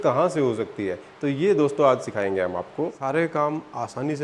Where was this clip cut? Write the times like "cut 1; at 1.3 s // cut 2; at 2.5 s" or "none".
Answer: cut 1; at 2.9 s

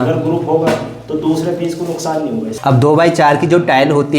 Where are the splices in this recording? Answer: cut 1; at 2.5 s

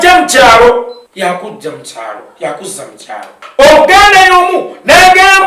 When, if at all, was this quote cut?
cut 1; at 1.0 s // cut 2; at 3.4 s

